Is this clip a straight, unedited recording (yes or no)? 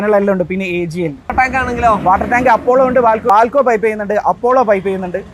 no